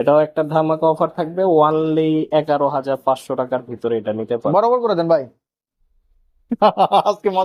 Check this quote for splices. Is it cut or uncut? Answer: uncut